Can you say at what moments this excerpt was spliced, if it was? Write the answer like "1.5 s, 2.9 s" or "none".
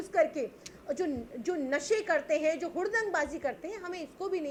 none